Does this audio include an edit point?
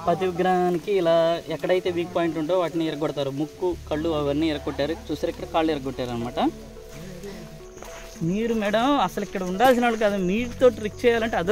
yes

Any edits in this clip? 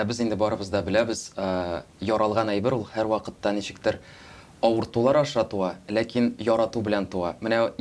no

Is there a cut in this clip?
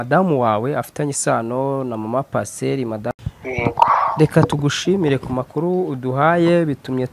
yes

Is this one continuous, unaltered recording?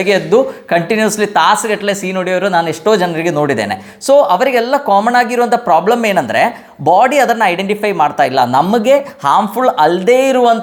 yes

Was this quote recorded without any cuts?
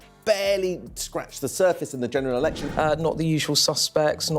no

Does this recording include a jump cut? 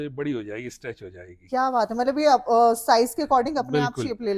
no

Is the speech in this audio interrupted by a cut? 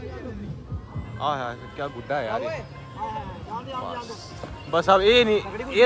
no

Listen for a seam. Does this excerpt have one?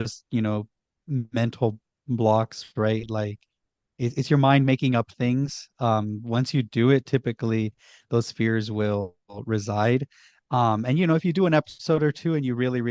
no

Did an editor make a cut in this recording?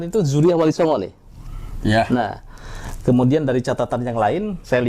no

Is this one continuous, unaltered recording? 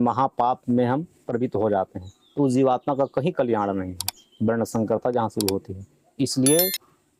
yes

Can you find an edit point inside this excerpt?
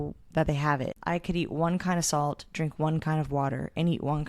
yes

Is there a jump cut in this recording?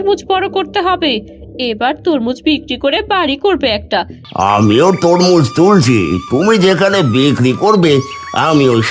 yes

